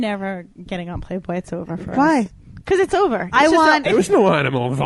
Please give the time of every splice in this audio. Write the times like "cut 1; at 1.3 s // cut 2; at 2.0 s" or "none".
none